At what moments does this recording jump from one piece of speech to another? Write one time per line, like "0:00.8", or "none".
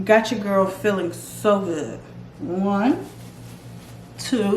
0:02.3